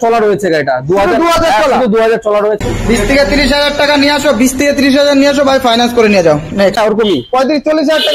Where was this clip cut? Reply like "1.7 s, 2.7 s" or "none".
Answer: 2.6 s, 6.8 s